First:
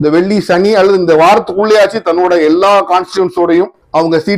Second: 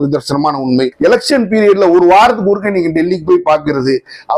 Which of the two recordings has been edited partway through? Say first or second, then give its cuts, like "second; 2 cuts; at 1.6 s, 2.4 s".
second; 1 cut; at 0.9 s